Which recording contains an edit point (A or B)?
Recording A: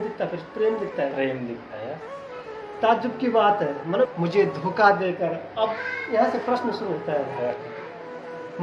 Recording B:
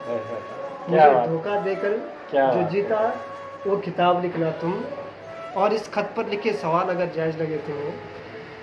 A